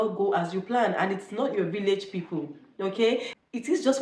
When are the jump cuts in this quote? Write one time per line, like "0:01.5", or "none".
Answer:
none